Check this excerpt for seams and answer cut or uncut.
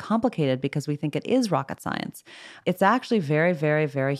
cut